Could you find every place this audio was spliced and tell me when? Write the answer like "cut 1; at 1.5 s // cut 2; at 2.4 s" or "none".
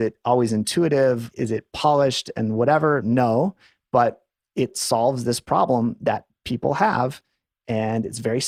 none